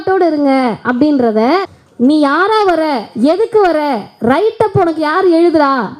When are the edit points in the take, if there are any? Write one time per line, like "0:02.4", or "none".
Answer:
0:01.8